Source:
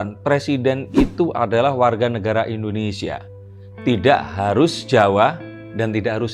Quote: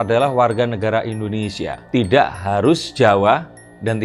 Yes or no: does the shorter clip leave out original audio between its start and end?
yes